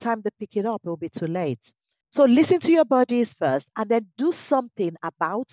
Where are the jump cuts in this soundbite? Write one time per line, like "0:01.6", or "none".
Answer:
none